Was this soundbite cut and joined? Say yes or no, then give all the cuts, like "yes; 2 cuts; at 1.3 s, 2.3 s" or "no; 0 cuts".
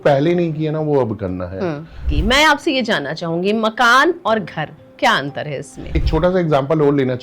yes; 2 cuts; at 2.1 s, 5.9 s